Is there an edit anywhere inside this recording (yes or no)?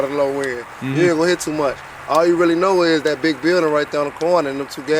no